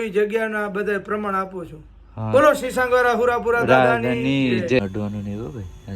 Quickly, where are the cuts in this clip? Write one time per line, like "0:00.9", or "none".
0:04.8